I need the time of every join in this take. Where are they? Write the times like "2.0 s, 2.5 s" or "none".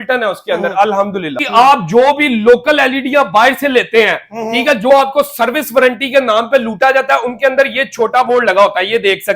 1.3 s